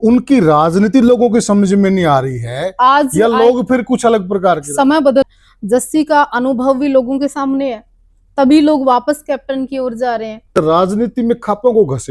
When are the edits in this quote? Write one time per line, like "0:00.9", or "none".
0:05.3
0:10.5